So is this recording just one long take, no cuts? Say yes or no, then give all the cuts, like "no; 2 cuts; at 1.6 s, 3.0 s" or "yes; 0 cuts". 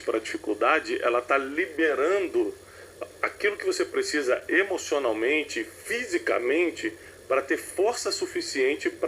yes; 0 cuts